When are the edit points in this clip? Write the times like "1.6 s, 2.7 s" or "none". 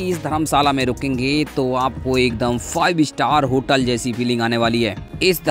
none